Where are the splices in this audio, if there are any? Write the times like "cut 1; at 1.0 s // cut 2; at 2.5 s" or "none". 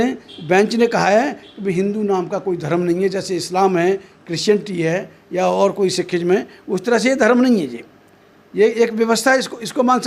none